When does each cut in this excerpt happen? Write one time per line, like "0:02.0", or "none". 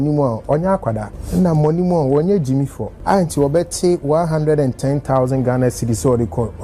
0:01.1
0:02.9